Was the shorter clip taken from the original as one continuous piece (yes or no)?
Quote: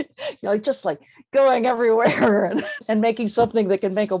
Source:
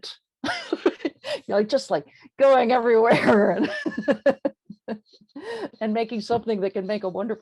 no